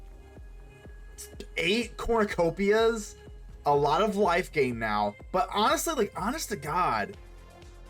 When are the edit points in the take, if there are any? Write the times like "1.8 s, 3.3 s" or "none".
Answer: none